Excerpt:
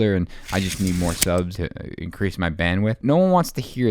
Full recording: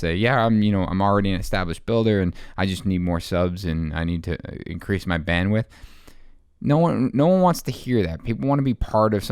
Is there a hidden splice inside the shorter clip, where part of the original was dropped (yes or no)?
yes